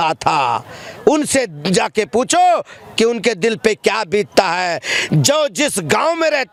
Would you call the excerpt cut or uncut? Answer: uncut